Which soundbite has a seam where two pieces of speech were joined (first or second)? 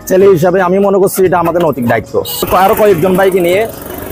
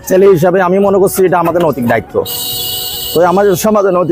first